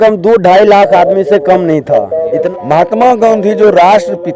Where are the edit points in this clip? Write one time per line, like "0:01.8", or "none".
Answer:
0:02.5